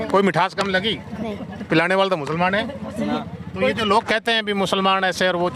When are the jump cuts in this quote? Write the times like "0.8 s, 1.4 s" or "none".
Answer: 3.3 s